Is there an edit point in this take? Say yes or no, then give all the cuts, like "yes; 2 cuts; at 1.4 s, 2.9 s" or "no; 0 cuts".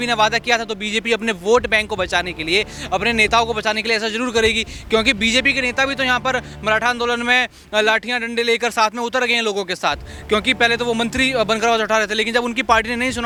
no; 0 cuts